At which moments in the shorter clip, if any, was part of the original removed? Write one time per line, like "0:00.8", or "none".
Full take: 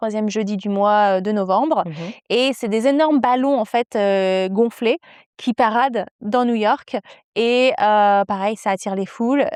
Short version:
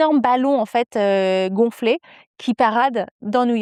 none